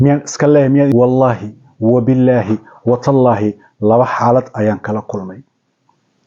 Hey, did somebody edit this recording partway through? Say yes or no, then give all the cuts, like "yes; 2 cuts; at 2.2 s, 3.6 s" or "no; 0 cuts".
yes; 1 cut; at 0.9 s